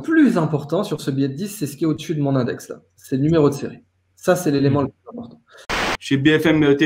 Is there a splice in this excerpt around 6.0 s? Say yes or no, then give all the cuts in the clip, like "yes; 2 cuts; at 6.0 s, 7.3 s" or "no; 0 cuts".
yes; 1 cut; at 6.0 s